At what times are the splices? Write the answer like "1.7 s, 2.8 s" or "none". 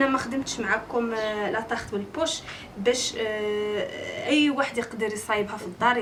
none